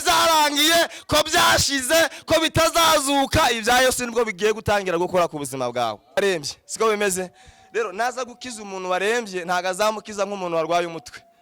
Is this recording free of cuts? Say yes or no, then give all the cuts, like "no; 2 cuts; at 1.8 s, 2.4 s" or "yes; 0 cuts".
no; 1 cut; at 6.2 s